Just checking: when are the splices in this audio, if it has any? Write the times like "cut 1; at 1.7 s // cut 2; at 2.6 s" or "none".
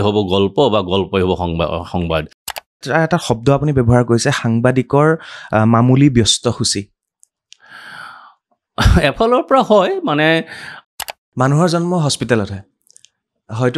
cut 1; at 2.5 s // cut 2; at 10.8 s